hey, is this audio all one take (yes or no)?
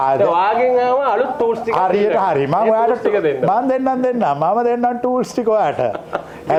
yes